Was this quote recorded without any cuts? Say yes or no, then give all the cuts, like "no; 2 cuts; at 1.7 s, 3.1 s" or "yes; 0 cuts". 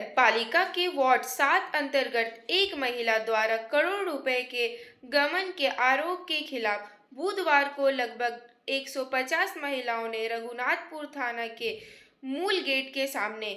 yes; 0 cuts